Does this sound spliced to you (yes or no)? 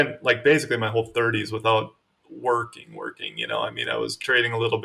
no